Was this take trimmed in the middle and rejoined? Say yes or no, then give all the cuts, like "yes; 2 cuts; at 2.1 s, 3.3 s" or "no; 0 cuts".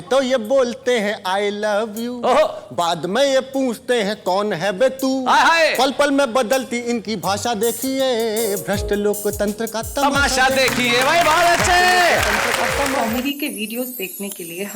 yes; 1 cut; at 13.0 s